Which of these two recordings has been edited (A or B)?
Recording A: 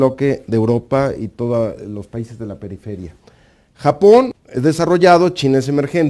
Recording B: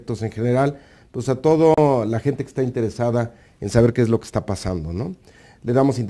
B